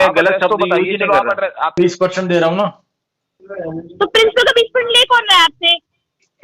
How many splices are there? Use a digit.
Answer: 1